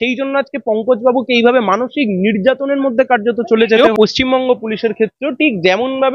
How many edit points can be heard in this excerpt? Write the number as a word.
one